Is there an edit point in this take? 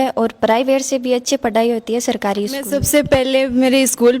yes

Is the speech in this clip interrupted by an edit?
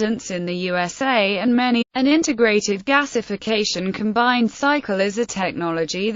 no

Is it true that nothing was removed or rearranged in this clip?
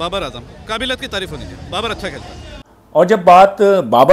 yes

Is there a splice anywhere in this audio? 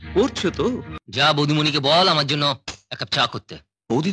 yes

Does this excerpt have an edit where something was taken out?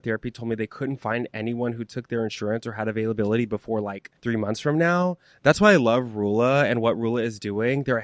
no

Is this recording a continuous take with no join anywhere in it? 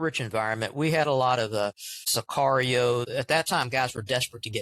no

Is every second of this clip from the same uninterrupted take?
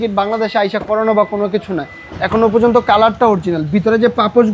yes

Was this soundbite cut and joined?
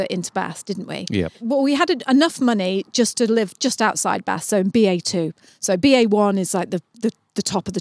yes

